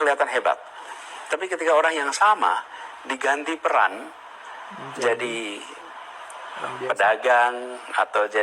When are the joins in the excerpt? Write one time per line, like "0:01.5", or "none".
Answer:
0:07.5